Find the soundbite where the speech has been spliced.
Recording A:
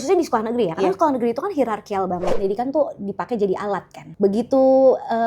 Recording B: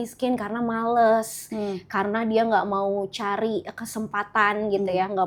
A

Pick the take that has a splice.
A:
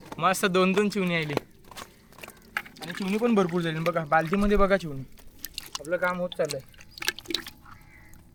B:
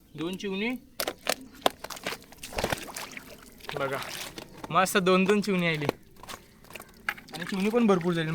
B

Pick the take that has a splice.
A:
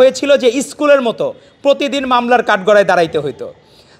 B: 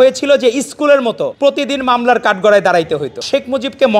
B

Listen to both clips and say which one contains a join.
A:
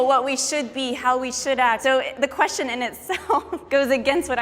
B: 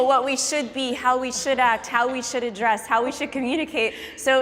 A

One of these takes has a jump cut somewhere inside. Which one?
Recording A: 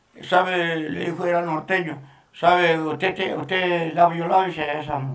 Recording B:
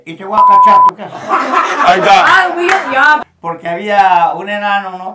B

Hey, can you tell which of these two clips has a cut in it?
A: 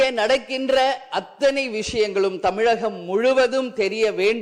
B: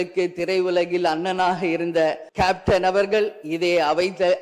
B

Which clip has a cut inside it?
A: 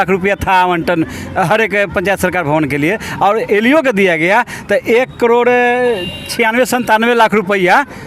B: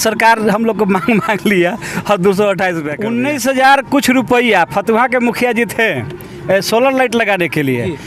B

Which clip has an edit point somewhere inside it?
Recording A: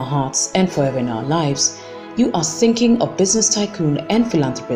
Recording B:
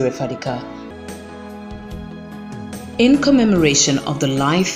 B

